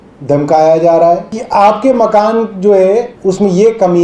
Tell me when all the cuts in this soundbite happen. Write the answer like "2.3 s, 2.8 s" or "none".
1.3 s, 3.1 s